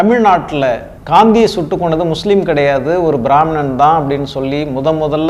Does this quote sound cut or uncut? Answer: cut